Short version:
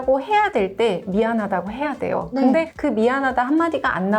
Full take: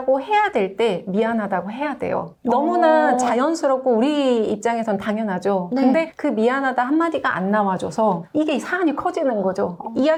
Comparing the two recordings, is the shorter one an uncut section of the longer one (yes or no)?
no